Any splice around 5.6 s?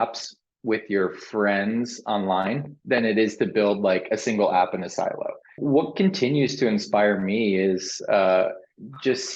yes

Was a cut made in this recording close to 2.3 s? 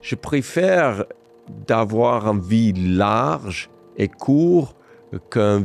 no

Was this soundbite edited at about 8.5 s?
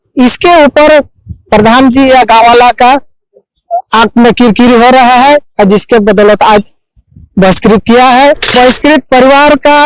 yes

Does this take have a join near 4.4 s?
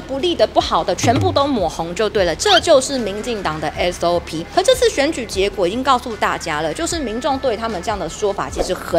yes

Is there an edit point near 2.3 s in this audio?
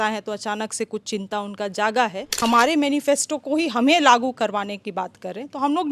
yes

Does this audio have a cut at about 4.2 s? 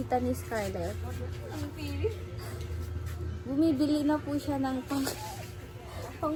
no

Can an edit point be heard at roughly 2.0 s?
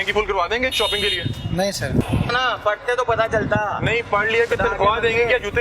yes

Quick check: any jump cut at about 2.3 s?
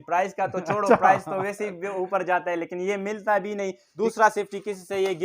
no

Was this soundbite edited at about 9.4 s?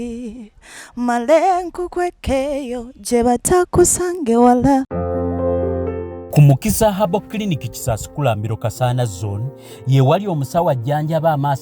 no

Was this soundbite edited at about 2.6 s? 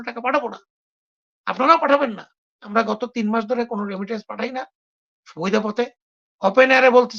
yes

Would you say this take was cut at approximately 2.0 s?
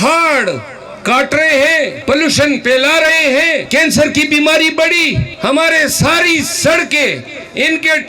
yes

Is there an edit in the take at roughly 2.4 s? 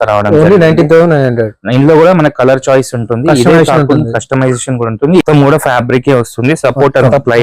no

